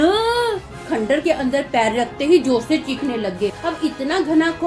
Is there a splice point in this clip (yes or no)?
yes